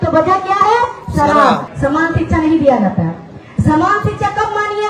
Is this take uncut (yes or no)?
no